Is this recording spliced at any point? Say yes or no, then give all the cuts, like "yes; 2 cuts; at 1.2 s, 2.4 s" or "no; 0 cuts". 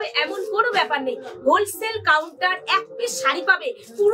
no; 0 cuts